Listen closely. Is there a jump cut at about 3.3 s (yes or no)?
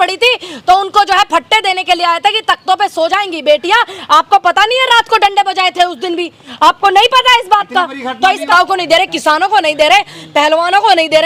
no